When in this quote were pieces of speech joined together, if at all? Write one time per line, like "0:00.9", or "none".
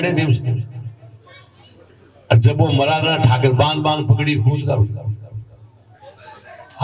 none